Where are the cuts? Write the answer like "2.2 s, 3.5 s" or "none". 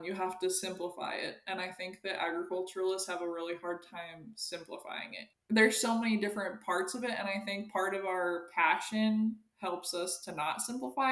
5.3 s